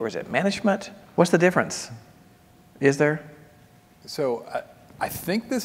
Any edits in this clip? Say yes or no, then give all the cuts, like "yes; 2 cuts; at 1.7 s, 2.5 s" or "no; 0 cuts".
yes; 1 cut; at 1.0 s